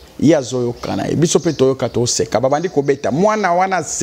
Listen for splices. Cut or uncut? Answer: uncut